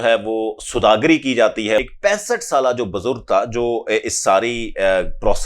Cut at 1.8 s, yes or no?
yes